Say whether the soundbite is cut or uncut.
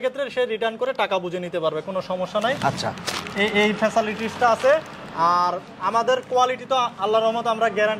uncut